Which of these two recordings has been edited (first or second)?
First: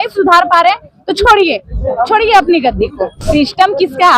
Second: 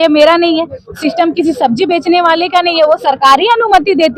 first